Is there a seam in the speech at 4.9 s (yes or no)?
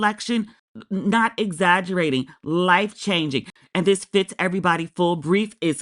no